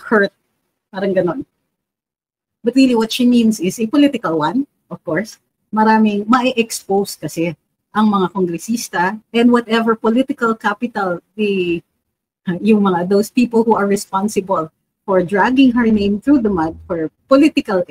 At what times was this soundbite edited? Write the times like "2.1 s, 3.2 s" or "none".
9.2 s